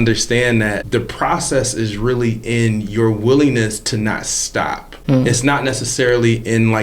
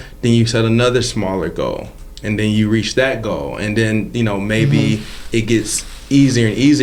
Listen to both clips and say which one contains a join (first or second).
first